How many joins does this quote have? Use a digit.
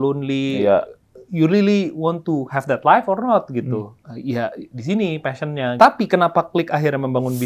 2